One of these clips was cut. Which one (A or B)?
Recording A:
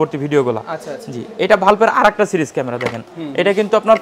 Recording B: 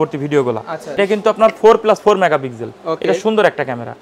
B